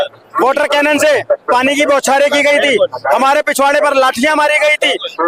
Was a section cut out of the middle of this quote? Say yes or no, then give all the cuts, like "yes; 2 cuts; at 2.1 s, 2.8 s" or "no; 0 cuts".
no; 0 cuts